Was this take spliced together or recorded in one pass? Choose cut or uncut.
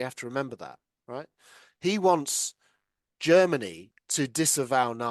uncut